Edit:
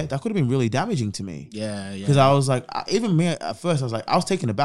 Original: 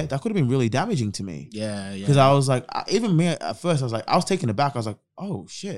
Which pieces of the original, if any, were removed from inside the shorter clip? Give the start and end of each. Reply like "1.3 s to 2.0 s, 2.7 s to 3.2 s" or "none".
none